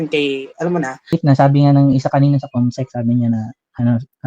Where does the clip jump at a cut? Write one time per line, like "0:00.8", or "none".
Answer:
0:01.1